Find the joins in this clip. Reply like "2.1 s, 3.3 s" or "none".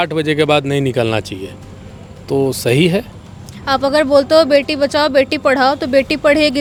none